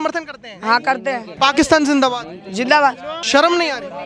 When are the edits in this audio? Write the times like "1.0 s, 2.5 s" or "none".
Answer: 1.3 s, 3.1 s